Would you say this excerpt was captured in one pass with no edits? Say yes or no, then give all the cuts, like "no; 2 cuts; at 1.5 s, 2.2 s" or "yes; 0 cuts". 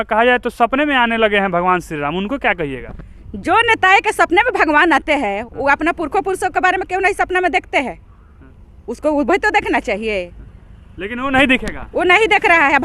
yes; 0 cuts